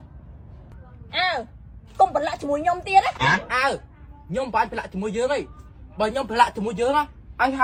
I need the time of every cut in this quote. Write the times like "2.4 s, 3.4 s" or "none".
none

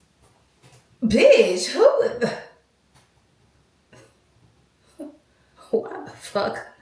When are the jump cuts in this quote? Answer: none

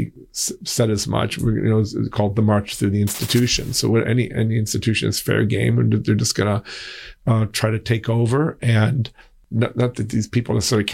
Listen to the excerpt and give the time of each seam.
9.4 s

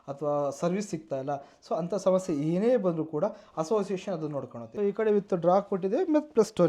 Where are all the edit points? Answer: 4.6 s

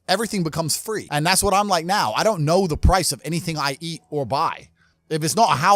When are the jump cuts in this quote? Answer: 1.1 s

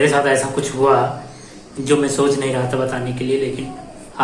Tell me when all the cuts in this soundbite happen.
none

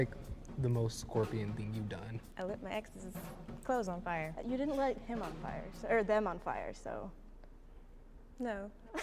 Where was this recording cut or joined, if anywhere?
2.2 s, 4.4 s

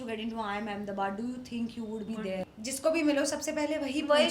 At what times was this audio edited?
2.4 s

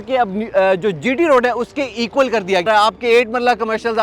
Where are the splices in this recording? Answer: 2.6 s

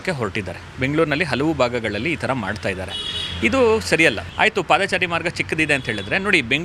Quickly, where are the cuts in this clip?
4.2 s

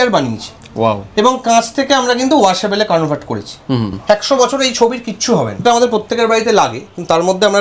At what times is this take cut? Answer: 3.9 s, 5.6 s

